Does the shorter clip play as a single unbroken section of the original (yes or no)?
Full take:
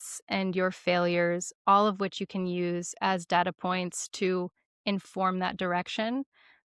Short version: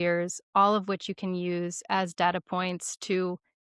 yes